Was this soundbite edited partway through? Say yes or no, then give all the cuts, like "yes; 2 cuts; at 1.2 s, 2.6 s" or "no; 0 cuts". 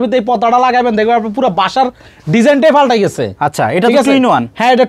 no; 0 cuts